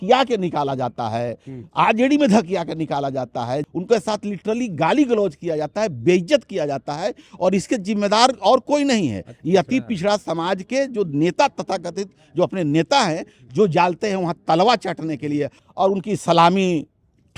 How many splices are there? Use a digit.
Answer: 2